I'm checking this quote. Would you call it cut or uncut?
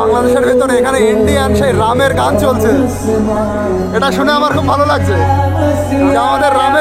uncut